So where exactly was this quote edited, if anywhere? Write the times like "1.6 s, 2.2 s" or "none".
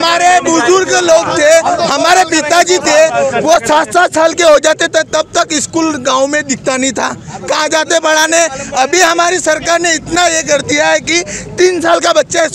none